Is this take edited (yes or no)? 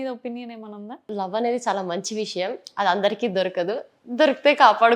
yes